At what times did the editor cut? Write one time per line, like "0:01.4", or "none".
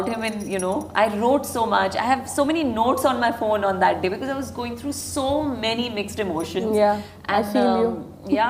none